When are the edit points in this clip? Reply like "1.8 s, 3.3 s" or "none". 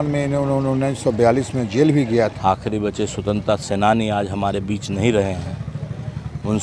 2.4 s

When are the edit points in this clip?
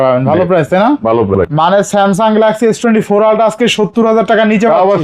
1.3 s

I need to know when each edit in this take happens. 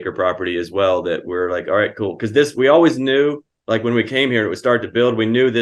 none

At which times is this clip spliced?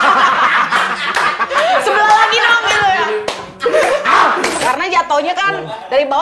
4.6 s

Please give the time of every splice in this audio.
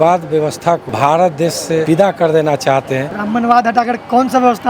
0.9 s, 1.8 s, 3.1 s

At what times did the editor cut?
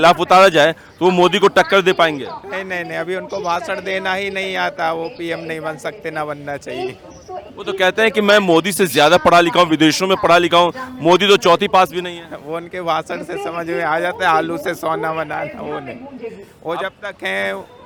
none

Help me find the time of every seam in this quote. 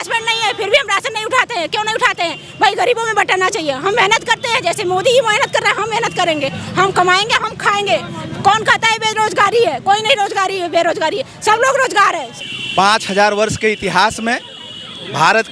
12.3 s

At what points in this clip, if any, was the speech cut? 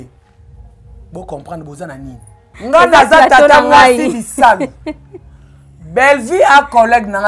2.5 s

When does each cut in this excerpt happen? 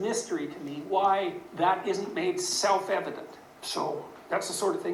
1.4 s, 3.3 s

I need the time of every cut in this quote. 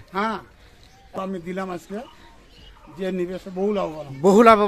1.2 s

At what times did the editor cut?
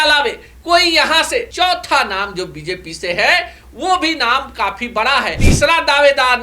1.5 s, 5.4 s

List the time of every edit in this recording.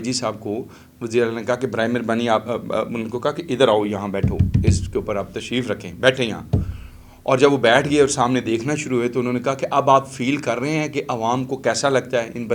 none

